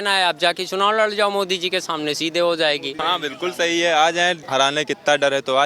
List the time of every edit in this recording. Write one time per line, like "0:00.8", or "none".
0:02.9
0:04.4